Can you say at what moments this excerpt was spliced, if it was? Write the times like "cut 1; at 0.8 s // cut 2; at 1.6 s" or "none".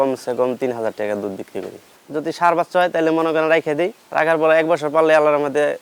cut 1; at 1.8 s // cut 2; at 4.0 s